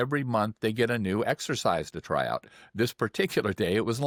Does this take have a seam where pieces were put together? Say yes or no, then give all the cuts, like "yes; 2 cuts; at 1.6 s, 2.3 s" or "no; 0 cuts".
no; 0 cuts